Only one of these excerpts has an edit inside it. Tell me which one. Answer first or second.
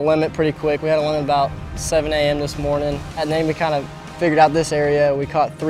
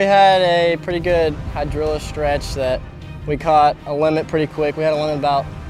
first